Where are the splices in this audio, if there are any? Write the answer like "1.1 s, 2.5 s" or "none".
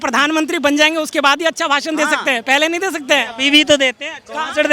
none